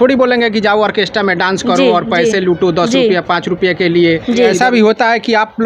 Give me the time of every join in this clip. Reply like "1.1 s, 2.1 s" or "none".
4.5 s